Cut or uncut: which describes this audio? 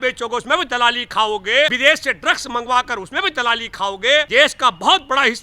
cut